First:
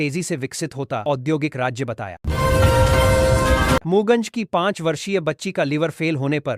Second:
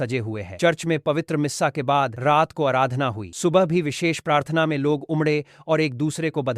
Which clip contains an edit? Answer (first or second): first